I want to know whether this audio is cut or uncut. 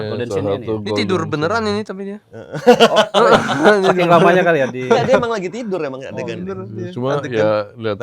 uncut